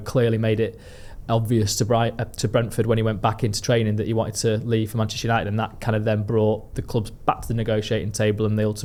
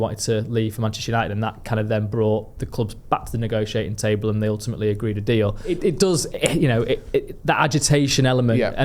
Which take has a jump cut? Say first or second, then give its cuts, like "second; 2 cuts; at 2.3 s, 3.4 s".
second; 1 cut; at 5.7 s